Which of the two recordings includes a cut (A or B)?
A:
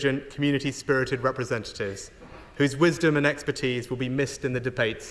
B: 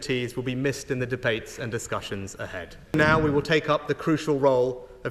B